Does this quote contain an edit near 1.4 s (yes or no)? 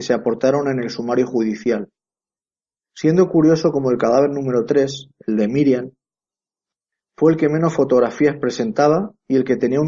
yes